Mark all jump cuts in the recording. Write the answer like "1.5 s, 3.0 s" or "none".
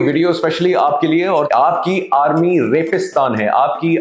1.5 s